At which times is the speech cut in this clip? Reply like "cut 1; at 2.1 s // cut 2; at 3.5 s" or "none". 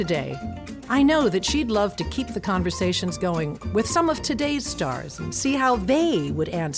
none